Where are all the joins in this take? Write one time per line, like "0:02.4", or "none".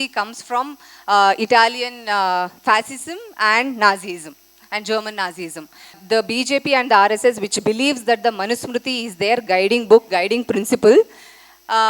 0:06.0

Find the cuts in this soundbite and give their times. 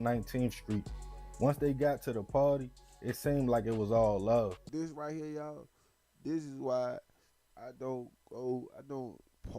0:04.7

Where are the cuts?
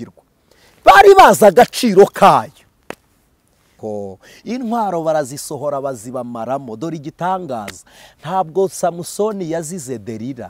0:03.8

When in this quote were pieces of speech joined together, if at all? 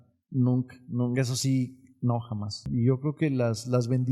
0:02.6

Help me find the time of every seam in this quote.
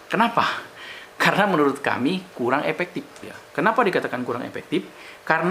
0:03.3

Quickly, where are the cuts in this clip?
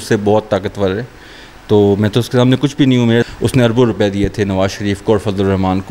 0:03.3

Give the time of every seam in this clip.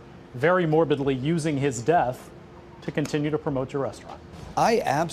none

